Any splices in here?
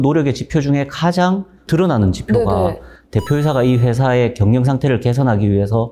no; 0 cuts

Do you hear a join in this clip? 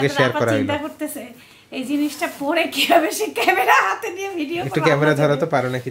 no; 0 cuts

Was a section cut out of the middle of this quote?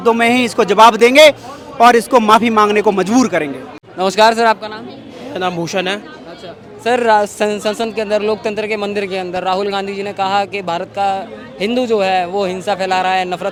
no; 0 cuts

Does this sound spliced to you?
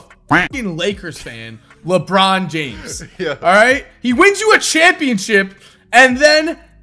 no; 0 cuts

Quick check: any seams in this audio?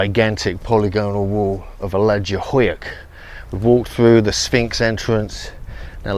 no; 0 cuts

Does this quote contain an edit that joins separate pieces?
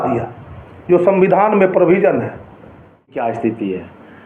yes; 1 cut; at 3.2 s

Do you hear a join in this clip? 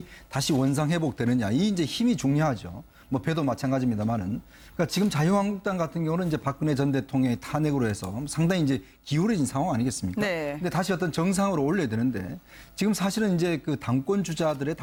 no; 0 cuts

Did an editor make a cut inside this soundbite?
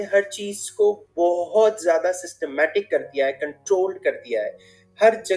no; 0 cuts

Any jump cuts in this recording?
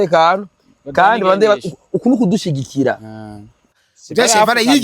yes; 1 cut; at 3.7 s

